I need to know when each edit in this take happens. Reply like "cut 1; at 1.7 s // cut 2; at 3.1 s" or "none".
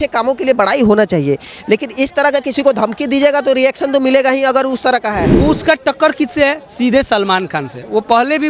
cut 1; at 5.3 s